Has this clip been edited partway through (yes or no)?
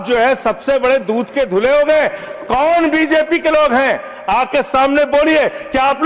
no